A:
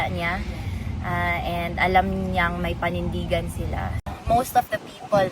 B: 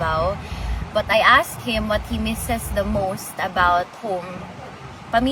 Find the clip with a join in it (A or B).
A